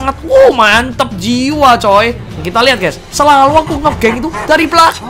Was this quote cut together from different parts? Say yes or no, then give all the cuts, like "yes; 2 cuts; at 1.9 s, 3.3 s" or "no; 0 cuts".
yes; 1 cut; at 2.3 s